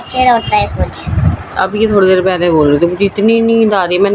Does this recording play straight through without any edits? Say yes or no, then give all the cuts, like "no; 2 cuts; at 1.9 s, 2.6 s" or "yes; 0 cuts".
yes; 0 cuts